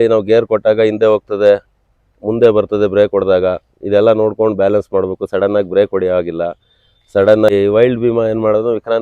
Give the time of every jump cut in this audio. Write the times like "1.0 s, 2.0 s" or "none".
7.5 s